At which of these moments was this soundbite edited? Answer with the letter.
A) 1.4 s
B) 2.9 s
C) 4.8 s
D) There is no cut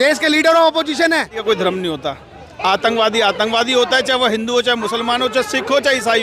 A